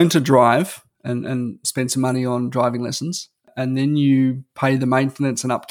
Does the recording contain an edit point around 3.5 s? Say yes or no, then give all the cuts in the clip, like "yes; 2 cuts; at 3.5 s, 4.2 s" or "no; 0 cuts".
yes; 1 cut; at 3.5 s